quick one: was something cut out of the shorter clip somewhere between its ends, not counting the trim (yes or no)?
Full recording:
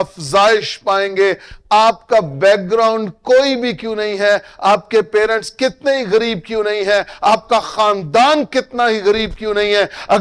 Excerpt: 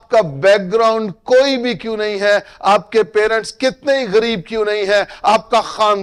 no